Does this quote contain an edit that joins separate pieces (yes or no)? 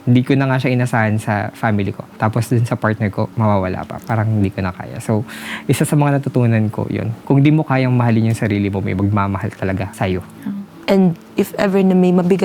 yes